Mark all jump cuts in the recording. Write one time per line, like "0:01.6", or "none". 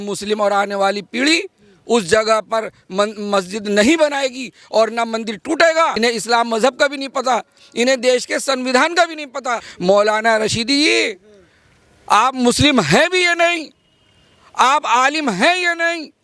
0:05.9
0:09.7